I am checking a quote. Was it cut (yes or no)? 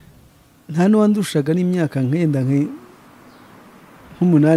no